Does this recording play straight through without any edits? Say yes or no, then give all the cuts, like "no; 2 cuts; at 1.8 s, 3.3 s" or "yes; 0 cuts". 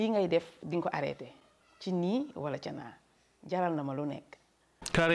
yes; 0 cuts